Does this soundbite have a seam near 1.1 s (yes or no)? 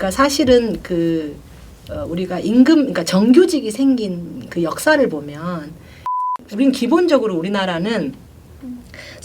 no